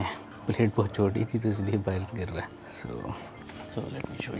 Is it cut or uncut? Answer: uncut